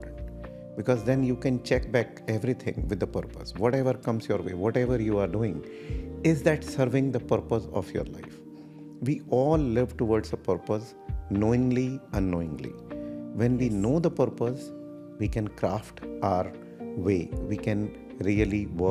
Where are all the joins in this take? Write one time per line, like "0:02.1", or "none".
none

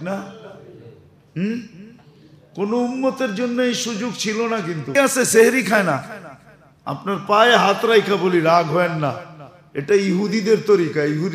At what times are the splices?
0:04.9

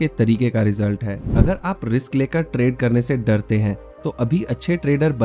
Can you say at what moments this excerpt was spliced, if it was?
0:01.3

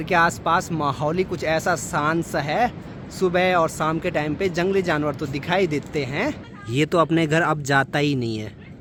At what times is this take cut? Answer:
none

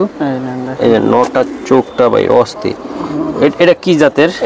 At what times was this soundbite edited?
none

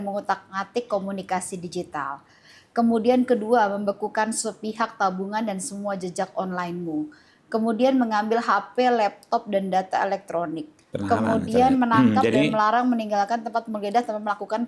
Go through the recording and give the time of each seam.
none

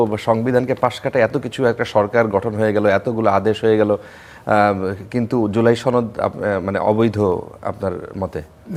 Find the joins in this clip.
none

